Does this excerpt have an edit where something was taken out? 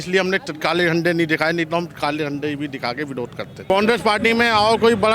yes; 1 cut; at 3.6 s

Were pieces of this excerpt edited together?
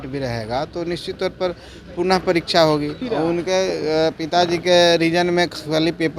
yes; 1 cut; at 3.0 s

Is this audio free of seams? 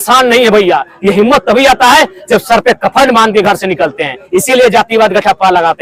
yes; 0 cuts

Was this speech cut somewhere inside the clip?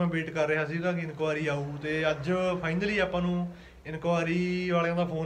no; 0 cuts

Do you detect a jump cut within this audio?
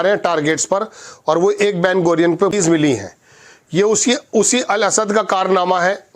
yes; 1 cut; at 2.5 s

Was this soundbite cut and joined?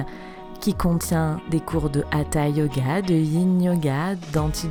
no; 0 cuts

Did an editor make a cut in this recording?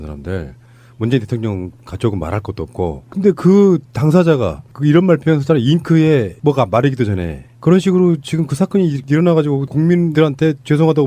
yes; 1 cut; at 4.8 s

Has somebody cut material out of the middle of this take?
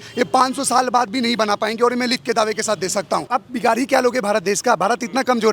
yes; 1 cut; at 3.2 s

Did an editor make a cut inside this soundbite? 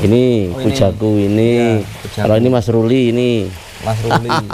no; 0 cuts

